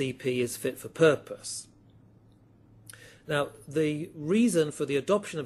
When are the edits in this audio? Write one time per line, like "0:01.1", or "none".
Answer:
none